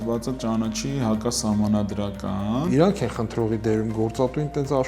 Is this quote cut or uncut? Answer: cut